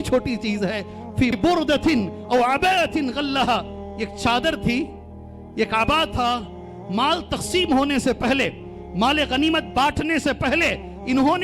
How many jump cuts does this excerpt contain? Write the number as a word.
one